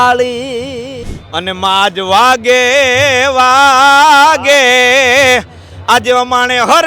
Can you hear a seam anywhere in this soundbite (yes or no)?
yes